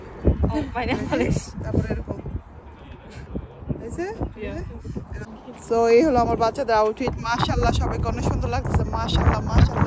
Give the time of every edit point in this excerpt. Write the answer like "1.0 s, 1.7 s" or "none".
none